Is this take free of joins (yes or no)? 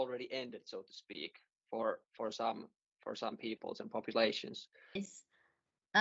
no